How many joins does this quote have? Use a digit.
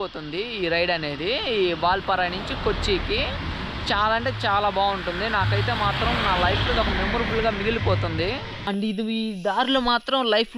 1